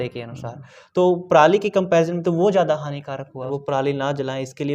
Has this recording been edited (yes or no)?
yes